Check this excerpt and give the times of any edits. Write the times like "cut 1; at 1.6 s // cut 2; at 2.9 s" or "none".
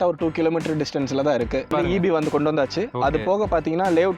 cut 1; at 1.7 s